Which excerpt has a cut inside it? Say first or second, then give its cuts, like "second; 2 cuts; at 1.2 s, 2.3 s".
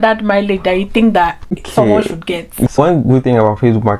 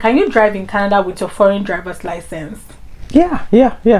first; 2 cuts; at 1.6 s, 2.8 s